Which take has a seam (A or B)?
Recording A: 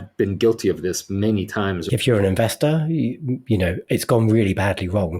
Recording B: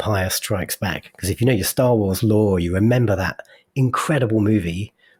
A